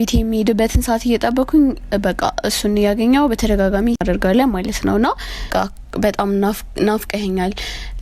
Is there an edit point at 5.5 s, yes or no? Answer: yes